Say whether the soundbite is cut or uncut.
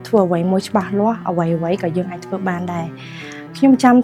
uncut